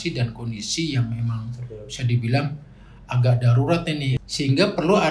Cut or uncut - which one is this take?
cut